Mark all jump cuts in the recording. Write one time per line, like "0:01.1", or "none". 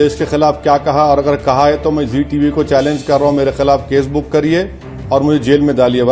none